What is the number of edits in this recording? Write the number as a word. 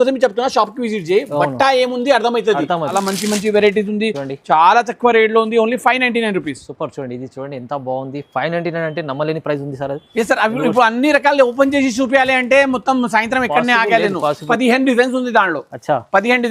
two